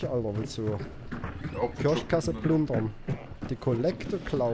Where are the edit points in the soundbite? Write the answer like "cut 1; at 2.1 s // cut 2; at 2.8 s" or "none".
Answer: none